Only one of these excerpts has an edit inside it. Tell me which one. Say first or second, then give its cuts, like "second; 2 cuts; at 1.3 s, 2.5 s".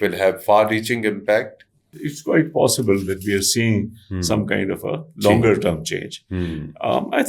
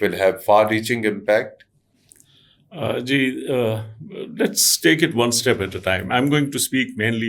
first; 1 cut; at 2.1 s